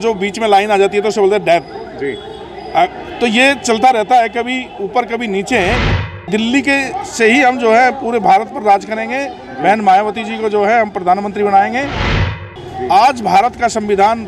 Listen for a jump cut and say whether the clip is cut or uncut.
cut